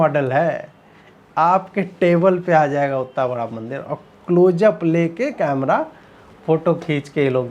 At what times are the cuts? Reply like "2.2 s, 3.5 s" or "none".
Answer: none

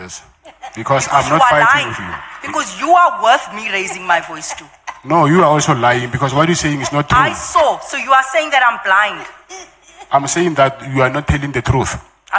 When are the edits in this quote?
none

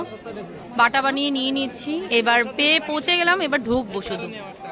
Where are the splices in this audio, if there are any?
none

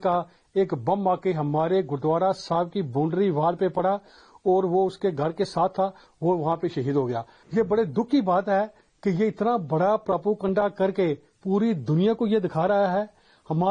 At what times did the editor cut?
7.3 s

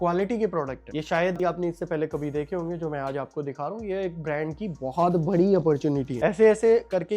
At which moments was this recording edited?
none

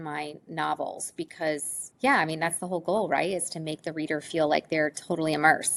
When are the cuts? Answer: none

